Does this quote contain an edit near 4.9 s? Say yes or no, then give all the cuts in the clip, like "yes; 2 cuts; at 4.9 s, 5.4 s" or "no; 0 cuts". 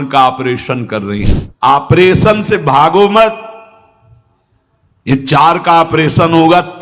no; 1 cut; at 1.2 s